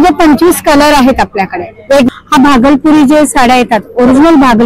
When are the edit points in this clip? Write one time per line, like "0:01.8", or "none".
0:02.1